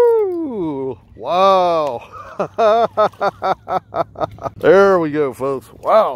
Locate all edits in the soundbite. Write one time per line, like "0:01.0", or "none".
0:04.4